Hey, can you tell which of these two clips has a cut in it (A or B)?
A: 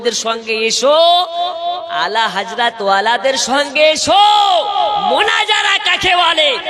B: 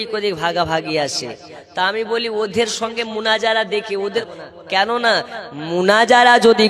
B